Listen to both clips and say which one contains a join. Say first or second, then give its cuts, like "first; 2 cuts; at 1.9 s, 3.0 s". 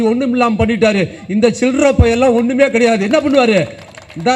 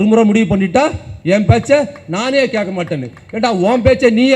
second; 1 cut; at 1.1 s